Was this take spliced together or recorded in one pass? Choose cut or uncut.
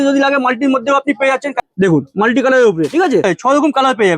cut